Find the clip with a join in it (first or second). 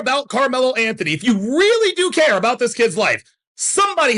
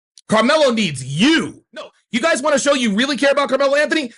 second